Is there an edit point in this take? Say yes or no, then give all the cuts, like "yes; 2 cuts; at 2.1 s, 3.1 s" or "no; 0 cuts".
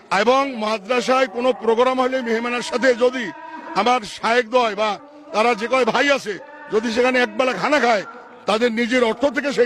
no; 0 cuts